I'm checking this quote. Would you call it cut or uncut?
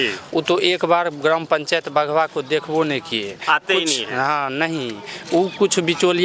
uncut